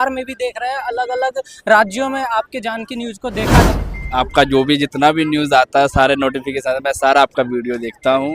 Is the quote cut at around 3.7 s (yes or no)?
yes